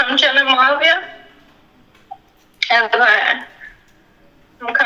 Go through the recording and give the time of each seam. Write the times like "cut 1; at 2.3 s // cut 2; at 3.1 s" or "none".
none